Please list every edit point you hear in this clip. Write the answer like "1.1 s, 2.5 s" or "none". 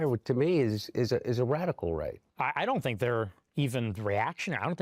none